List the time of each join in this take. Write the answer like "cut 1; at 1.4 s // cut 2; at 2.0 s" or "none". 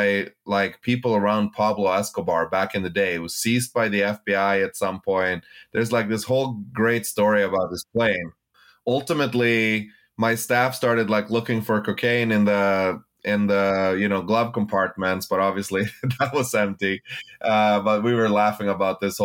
cut 1; at 8.4 s